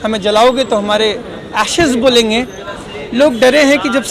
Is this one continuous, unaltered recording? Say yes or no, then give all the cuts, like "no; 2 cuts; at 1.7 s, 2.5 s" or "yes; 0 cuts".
no; 1 cut; at 2.6 s